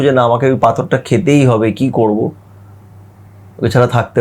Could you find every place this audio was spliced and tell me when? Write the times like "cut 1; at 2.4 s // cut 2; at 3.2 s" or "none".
none